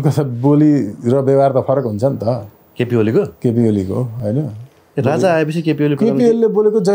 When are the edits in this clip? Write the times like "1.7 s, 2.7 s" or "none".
none